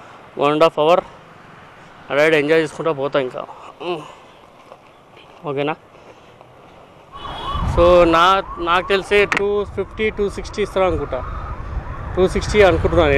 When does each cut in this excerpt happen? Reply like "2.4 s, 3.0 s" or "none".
none